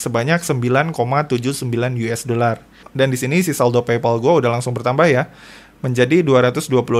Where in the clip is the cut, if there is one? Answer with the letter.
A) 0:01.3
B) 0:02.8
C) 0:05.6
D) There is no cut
B